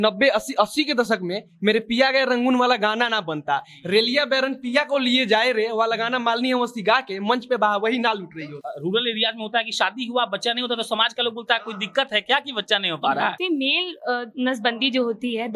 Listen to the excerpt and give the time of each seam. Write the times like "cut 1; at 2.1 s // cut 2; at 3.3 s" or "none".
cut 1; at 8.6 s // cut 2; at 13.4 s